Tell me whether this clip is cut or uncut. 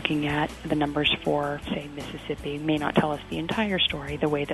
uncut